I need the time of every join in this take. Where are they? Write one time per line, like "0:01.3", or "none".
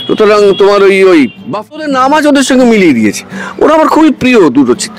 0:01.9

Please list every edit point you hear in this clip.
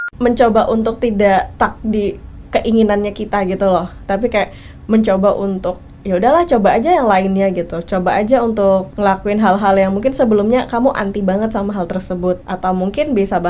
0:01.5
0:08.9
0:12.5

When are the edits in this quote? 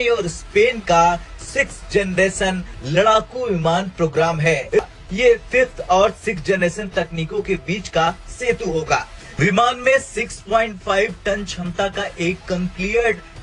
0:04.8
0:09.2

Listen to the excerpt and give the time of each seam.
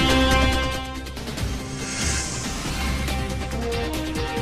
0:01.5

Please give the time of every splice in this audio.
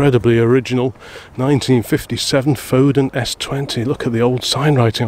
none

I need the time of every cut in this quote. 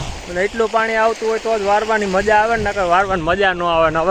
none

